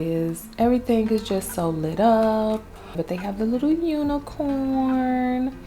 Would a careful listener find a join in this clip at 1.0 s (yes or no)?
no